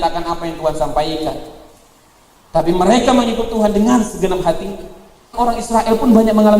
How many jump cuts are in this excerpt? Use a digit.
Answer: 1